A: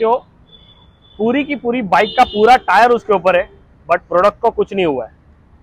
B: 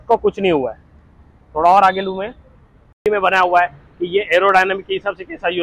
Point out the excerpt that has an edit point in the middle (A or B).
B